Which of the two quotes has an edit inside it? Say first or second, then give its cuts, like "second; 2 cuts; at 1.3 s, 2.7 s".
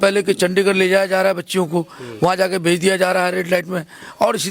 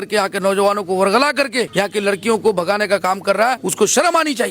second; 2 cuts; at 1.7 s, 3.6 s